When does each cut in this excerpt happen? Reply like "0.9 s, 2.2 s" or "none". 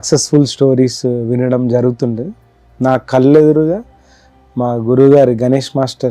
none